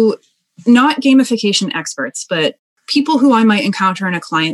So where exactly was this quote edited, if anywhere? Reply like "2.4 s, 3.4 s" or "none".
2.7 s